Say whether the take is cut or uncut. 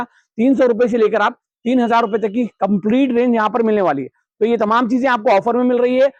uncut